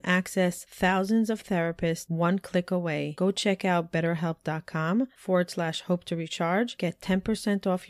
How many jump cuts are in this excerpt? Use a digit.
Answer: 0